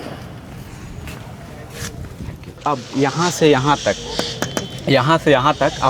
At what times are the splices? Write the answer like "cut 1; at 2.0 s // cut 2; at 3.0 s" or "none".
cut 1; at 2.4 s